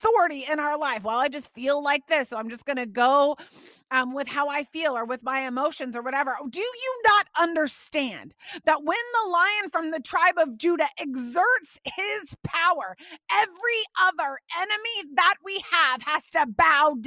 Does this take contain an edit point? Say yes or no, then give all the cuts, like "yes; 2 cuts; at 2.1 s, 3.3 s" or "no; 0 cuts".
no; 0 cuts